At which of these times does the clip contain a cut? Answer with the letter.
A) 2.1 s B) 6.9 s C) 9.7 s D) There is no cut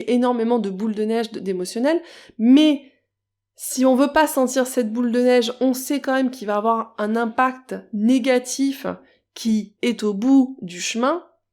C